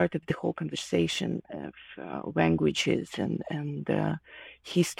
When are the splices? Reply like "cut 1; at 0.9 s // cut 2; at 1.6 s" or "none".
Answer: none

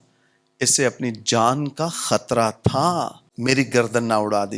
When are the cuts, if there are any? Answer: cut 1; at 3.2 s

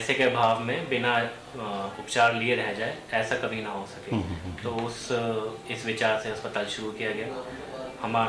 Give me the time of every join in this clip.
none

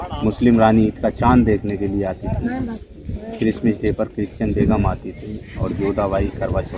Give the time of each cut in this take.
none

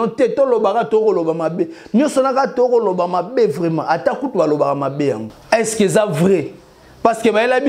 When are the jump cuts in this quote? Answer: cut 1; at 5.3 s

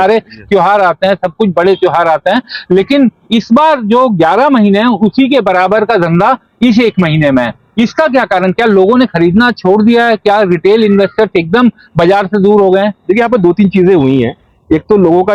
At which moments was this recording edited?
none

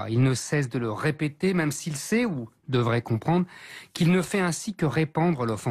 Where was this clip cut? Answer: cut 1; at 3.8 s

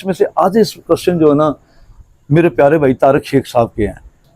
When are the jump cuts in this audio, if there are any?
none

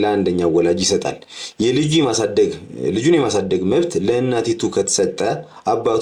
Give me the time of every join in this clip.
none

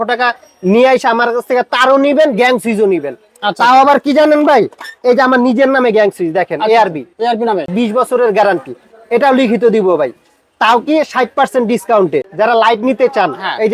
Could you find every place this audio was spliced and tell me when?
cut 1; at 7.7 s // cut 2; at 12.3 s

